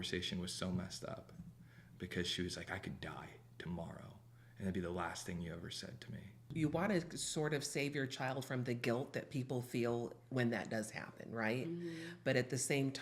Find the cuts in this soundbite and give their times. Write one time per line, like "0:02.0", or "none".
0:06.5